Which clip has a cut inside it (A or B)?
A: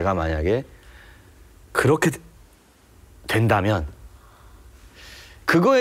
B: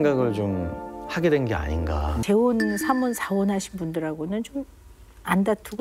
B